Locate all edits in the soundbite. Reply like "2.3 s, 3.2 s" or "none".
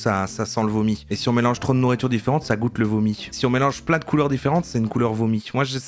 none